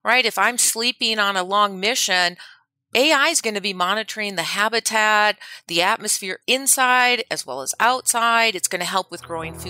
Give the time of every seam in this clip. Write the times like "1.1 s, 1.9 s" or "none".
none